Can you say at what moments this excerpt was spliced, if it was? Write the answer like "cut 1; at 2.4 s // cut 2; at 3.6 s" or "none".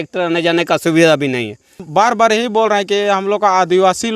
cut 1; at 1.8 s

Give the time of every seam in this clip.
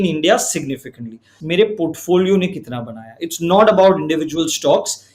cut 1; at 1.3 s

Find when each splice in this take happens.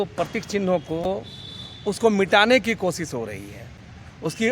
cut 1; at 1.1 s

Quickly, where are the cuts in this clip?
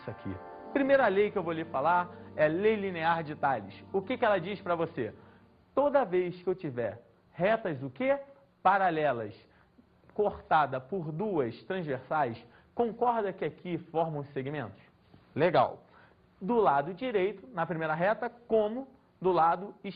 none

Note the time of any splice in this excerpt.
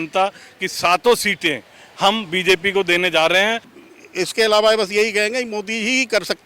cut 1; at 3.7 s

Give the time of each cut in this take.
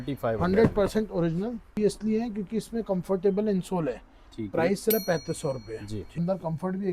cut 1; at 1.8 s // cut 2; at 6.2 s

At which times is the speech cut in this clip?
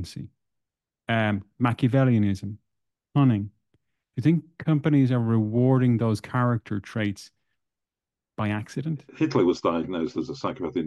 cut 1; at 9.1 s

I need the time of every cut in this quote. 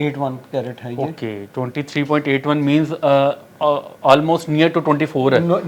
none

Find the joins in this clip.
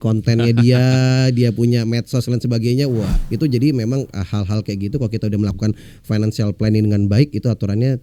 cut 1; at 3.2 s

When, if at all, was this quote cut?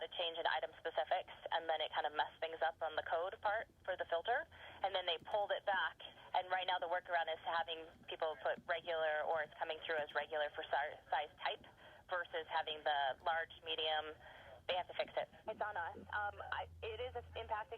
cut 1; at 15.4 s

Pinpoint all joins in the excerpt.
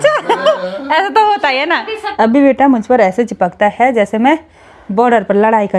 cut 1; at 2.0 s

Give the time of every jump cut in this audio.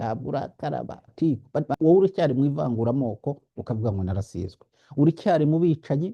cut 1; at 1.1 s

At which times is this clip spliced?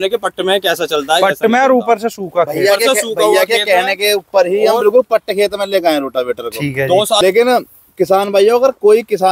cut 1; at 7.2 s

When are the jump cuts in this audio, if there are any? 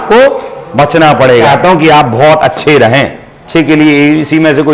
cut 1; at 1.5 s // cut 2; at 3.3 s

